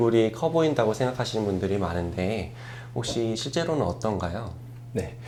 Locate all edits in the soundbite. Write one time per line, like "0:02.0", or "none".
none